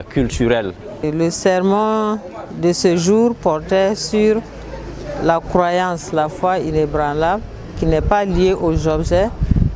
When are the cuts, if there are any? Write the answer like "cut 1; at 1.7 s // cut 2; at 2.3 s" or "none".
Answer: cut 1; at 1.0 s